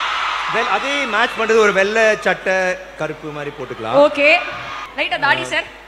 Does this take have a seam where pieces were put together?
no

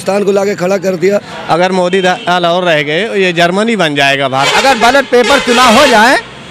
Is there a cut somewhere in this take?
yes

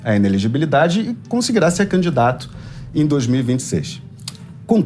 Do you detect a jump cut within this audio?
no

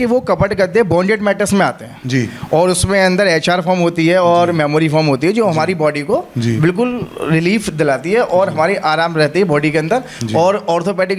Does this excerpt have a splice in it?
no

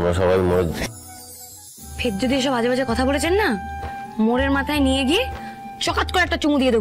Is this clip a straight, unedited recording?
no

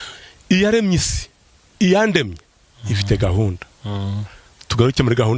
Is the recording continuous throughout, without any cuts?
yes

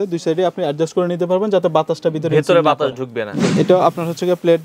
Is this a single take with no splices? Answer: no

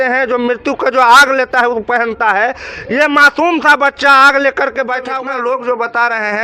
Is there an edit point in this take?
yes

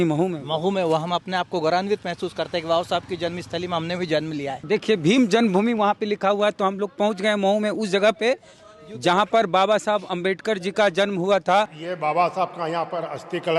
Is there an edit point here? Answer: yes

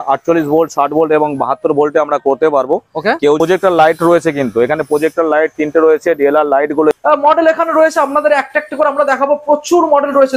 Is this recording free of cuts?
no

